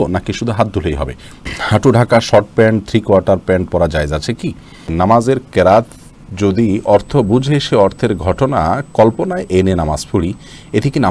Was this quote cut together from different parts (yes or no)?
yes